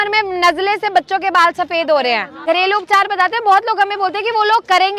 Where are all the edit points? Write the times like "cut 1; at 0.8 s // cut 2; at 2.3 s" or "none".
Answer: cut 1; at 2.3 s